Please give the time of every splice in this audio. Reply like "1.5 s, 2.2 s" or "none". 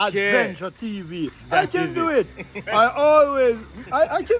none

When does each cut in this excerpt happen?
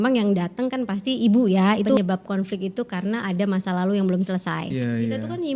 2.0 s, 4.7 s

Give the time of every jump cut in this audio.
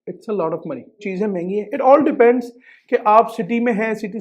1.1 s

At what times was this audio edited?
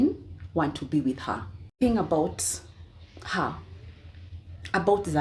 1.7 s

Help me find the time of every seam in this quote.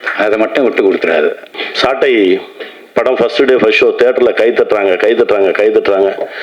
1.5 s

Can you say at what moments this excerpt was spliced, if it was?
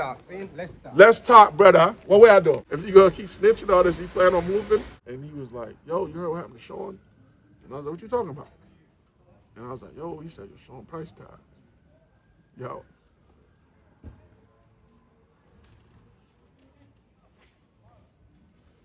2.7 s, 5.0 s

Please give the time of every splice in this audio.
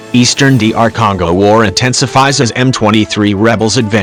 none

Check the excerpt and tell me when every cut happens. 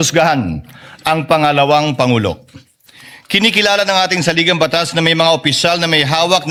none

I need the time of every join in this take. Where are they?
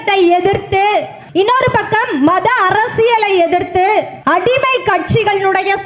1.2 s, 4.2 s

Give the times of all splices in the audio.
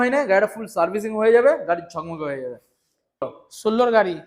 3.2 s

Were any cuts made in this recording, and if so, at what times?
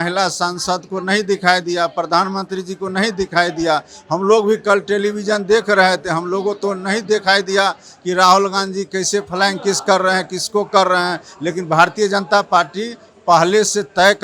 none

